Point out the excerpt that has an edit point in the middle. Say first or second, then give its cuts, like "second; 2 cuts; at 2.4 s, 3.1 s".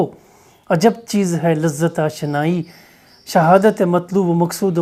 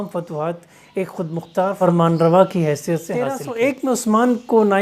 second; 2 cuts; at 1.8 s, 3.4 s